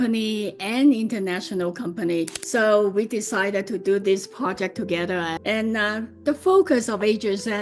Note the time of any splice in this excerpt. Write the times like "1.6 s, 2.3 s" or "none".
2.4 s, 5.3 s